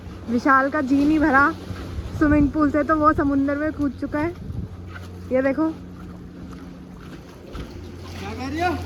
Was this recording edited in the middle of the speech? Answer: no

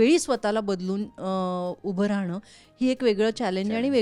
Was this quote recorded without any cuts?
yes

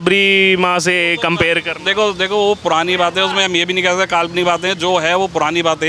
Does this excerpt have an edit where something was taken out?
no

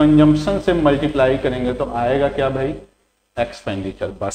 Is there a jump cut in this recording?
no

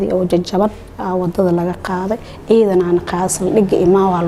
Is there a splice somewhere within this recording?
no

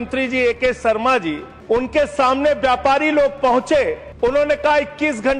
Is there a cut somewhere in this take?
yes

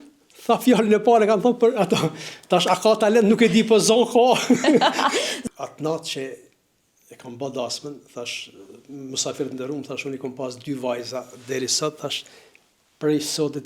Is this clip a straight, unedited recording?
no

